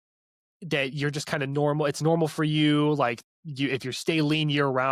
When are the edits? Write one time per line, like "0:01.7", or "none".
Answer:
none